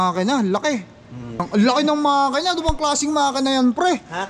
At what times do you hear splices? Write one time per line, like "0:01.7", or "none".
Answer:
0:01.4